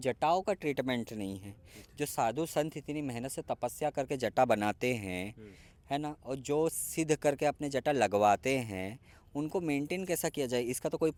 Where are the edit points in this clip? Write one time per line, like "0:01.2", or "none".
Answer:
none